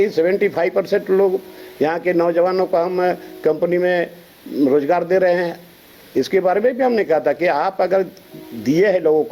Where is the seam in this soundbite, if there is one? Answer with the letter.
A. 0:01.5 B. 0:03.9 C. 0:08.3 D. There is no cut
D